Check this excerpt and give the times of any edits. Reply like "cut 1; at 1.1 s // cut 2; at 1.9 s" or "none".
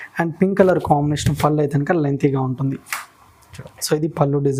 none

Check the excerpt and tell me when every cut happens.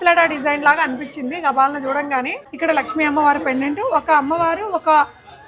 cut 1; at 2.4 s

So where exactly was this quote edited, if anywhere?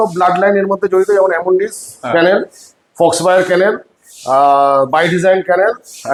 none

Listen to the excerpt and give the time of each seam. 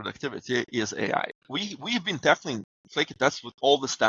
cut 1; at 1.5 s

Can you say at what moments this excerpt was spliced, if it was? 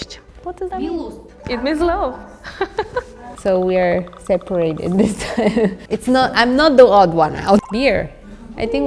cut 1; at 3.0 s // cut 2; at 5.8 s // cut 3; at 7.6 s

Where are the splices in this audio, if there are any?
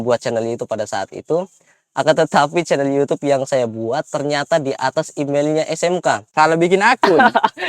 none

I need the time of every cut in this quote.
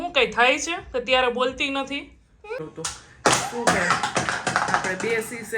cut 1; at 2.6 s

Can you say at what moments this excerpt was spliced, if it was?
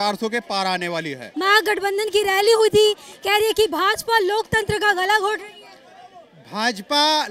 cut 1; at 1.2 s

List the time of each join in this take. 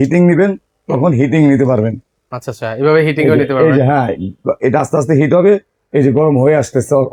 none

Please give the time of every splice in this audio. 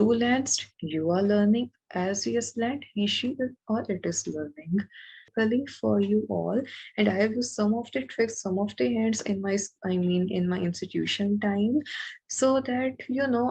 cut 1; at 5.3 s

